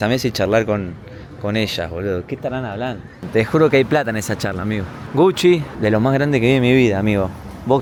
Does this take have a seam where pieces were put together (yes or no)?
no